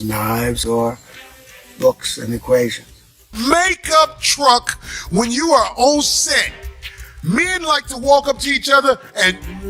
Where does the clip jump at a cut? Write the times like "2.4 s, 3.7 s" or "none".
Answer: 3.3 s